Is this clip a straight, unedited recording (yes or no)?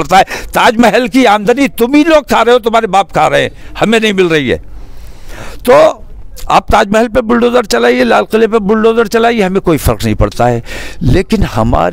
yes